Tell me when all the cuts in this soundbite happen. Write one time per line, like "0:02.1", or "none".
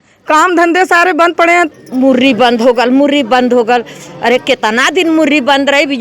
0:01.7